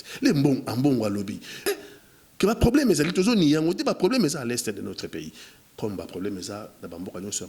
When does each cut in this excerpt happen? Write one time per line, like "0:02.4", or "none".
0:01.7